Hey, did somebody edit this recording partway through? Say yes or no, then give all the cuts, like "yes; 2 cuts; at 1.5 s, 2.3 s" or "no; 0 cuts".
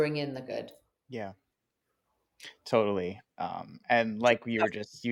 no; 0 cuts